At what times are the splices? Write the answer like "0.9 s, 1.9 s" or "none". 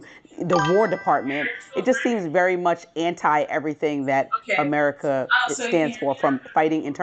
4.8 s

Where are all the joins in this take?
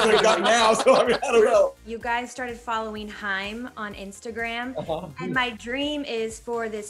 1.9 s

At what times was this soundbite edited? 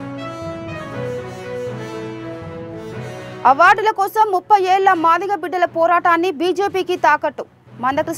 3.0 s

